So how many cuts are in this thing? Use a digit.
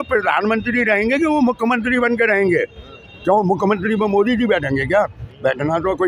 0